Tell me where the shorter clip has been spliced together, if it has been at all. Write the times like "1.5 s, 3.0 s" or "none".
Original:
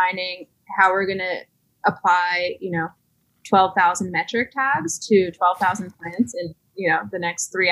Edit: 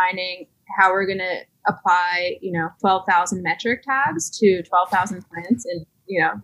1.5 s, 2.7 s